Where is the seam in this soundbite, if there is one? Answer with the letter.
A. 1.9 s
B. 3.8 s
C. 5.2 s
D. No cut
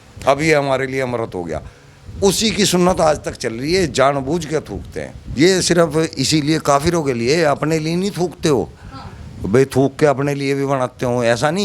C